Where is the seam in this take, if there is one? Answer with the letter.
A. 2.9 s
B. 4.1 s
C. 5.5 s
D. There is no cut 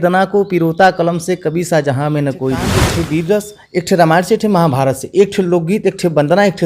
A